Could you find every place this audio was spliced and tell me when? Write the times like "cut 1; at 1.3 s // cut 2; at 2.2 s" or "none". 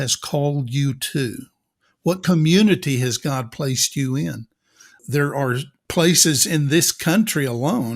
cut 1; at 5.0 s // cut 2; at 5.8 s